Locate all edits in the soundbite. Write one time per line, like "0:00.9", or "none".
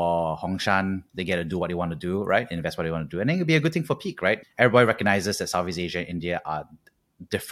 0:04.4